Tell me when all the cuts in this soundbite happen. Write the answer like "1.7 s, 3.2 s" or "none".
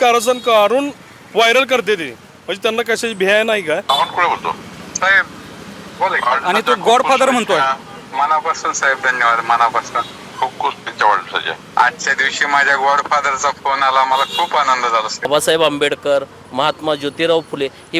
3.8 s, 15.3 s